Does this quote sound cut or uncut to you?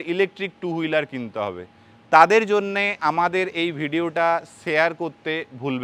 uncut